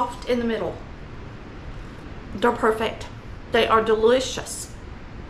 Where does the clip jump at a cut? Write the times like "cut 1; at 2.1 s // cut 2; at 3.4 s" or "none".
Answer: cut 1; at 2.0 s